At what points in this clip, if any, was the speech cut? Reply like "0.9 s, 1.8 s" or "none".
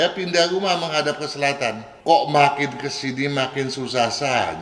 1.9 s